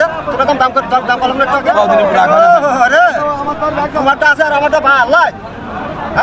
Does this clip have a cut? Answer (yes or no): no